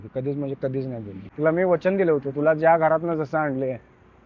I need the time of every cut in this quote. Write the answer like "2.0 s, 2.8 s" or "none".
1.2 s